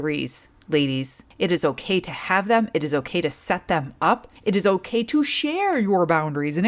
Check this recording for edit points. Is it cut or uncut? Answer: cut